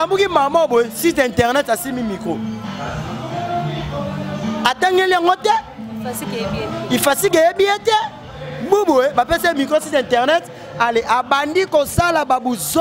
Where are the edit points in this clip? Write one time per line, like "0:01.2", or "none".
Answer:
none